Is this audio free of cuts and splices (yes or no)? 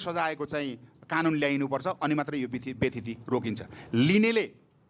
yes